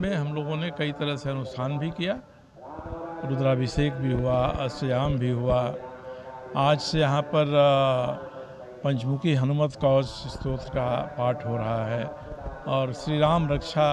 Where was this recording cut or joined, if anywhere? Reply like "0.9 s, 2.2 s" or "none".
none

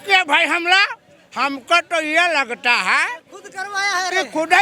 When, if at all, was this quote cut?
none

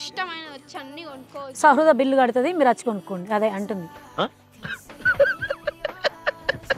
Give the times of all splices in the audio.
none

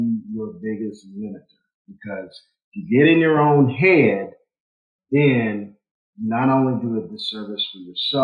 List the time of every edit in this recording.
none

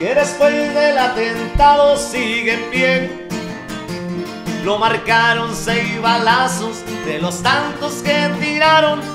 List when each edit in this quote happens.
none

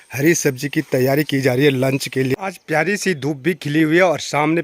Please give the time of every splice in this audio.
2.5 s

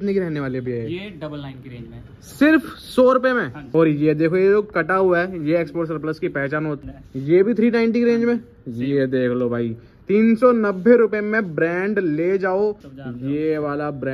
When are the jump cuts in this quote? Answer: 3.6 s, 6.8 s, 12.9 s

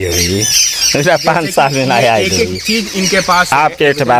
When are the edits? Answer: none

